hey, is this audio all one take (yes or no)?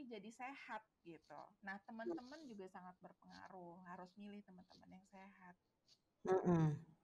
yes